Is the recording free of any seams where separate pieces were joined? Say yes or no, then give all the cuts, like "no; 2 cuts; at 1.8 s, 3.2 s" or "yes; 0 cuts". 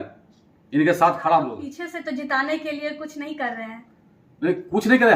no; 1 cut; at 1.7 s